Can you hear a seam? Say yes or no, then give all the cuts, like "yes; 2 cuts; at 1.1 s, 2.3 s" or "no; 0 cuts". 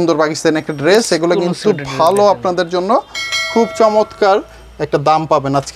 no; 0 cuts